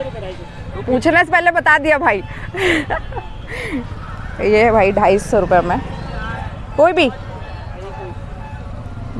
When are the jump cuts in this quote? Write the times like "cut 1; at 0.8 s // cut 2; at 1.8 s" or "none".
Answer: none